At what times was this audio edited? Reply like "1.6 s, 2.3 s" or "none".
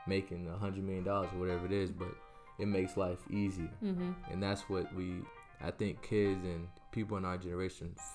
5.3 s, 6.8 s